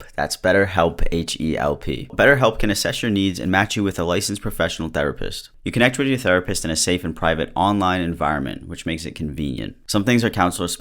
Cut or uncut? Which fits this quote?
cut